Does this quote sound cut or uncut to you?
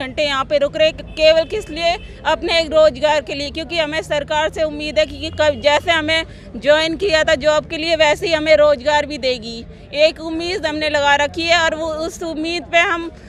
uncut